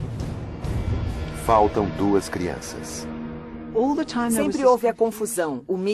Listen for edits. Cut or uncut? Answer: cut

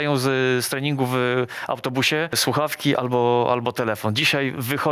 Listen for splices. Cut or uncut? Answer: cut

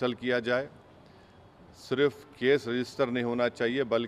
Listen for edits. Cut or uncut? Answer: uncut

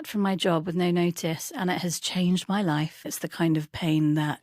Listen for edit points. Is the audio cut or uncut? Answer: cut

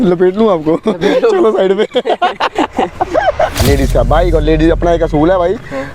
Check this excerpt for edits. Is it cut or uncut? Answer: cut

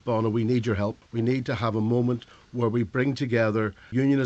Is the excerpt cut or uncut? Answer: cut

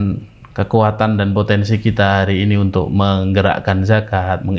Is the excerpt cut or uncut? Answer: uncut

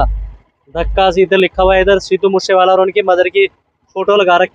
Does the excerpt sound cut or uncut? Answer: uncut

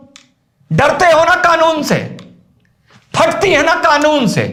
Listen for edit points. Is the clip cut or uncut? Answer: uncut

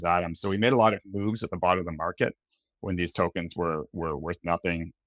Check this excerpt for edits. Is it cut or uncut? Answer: uncut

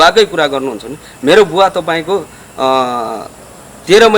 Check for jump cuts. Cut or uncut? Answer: uncut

